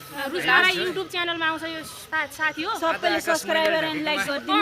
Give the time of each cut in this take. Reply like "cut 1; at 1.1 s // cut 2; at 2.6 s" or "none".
cut 1; at 2.0 s

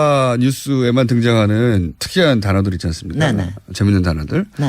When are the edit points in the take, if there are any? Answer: cut 1; at 2.9 s

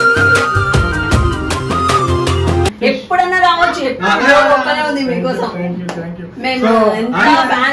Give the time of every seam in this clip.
cut 1; at 2.7 s

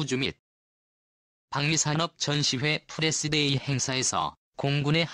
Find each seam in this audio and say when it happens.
none

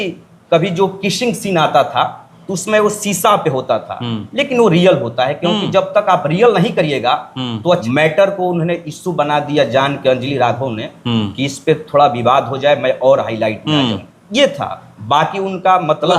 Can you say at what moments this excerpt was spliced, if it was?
cut 1; at 7.8 s

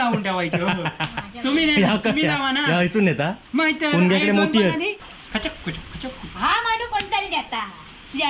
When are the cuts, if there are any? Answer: cut 1; at 5.0 s

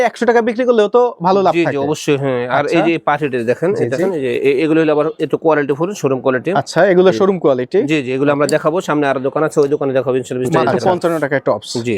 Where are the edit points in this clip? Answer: cut 1; at 4.1 s // cut 2; at 10.6 s

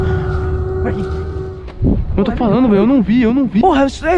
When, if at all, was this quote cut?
cut 1; at 1.5 s

